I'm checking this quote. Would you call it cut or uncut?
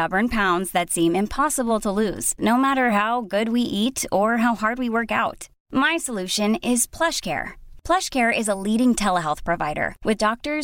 uncut